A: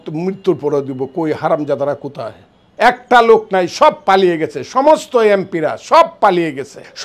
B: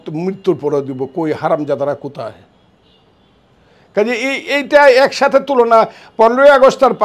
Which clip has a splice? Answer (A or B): A